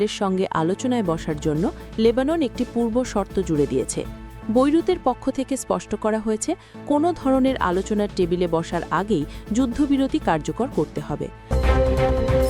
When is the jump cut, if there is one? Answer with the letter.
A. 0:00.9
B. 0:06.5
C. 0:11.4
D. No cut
C